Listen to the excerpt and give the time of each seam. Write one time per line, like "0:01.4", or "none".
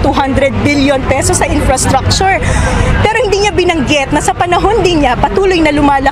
none